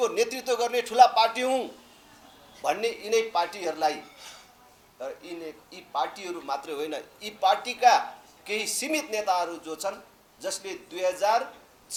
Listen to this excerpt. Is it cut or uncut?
uncut